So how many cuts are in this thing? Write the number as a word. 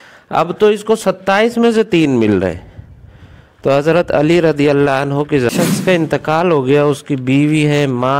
one